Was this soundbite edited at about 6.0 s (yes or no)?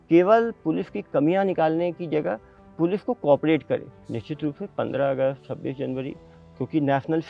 no